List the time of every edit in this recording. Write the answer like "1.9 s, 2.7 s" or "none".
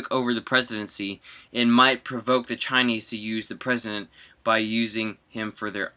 none